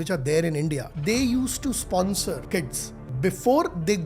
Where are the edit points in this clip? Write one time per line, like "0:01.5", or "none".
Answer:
0:00.9
0:02.9